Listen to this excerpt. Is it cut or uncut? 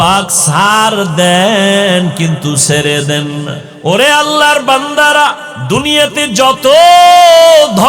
cut